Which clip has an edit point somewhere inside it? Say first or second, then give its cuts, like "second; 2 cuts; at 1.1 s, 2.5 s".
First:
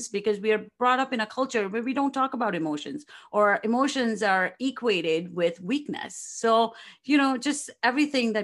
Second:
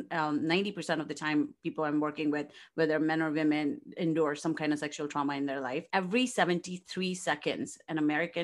second; 1 cut; at 5.8 s